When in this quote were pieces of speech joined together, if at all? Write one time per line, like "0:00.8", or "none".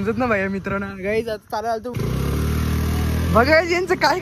0:01.9